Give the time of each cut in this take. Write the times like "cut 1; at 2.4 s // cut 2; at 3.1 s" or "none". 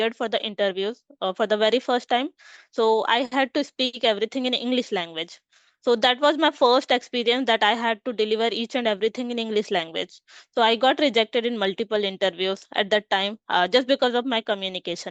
none